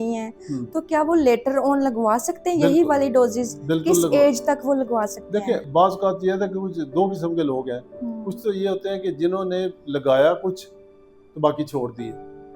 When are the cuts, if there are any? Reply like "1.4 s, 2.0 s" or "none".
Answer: none